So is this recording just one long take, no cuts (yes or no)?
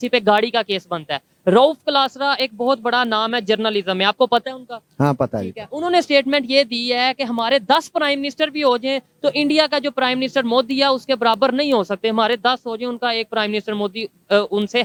yes